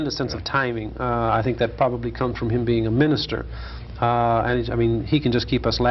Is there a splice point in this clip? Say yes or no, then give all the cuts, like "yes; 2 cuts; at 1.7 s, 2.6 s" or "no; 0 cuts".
no; 0 cuts